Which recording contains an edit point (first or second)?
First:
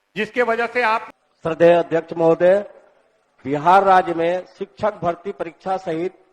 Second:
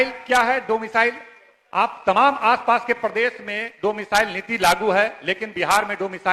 first